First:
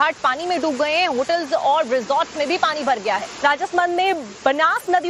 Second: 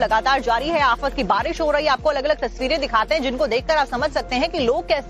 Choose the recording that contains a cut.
second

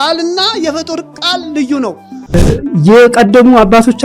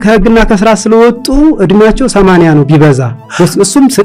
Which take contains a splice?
first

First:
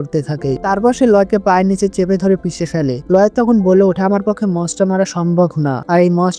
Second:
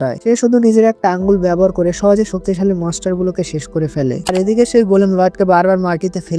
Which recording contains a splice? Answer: second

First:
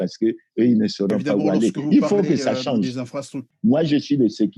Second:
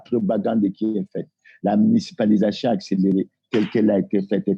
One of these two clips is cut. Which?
first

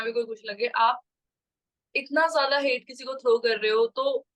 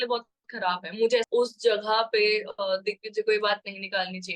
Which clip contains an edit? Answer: second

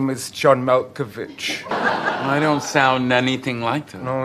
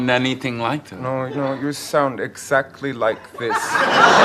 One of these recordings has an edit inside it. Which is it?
first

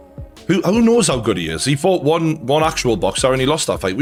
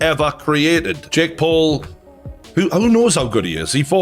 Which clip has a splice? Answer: second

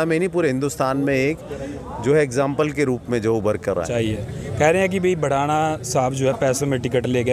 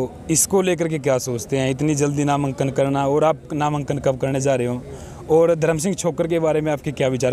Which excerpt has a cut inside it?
first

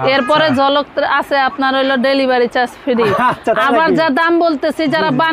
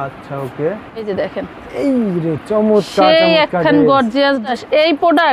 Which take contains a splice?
second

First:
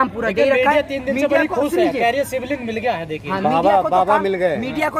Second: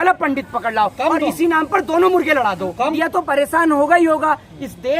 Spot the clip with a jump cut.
second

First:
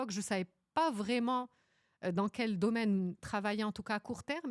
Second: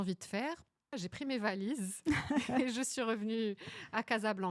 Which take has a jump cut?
second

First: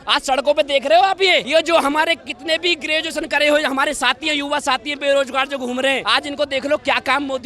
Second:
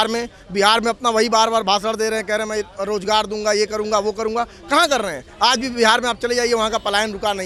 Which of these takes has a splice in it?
first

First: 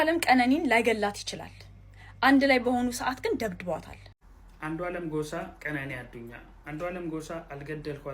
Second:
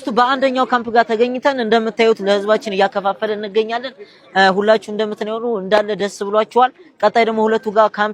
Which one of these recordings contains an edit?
first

